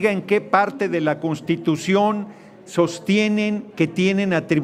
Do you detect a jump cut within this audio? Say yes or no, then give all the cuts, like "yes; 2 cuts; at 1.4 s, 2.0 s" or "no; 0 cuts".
no; 0 cuts